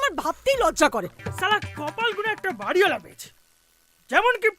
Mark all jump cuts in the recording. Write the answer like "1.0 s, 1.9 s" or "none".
1.1 s